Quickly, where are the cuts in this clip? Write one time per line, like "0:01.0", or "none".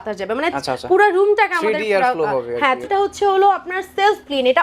0:02.9